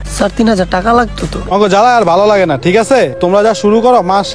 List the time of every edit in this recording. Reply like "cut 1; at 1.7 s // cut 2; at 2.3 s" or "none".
cut 1; at 1.5 s